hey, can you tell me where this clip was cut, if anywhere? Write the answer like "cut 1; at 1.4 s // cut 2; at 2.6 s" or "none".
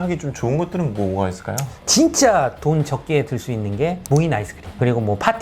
cut 1; at 1.7 s